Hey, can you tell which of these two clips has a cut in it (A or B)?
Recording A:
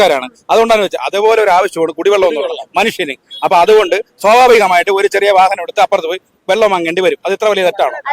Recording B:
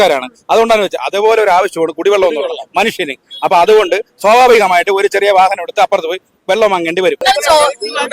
B